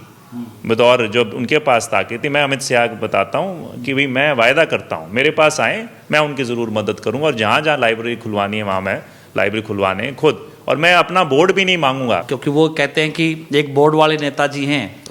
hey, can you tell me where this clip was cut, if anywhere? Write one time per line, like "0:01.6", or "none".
0:12.3